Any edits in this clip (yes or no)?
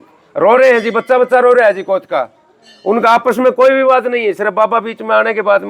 no